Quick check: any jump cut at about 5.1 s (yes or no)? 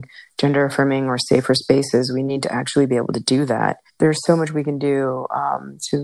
no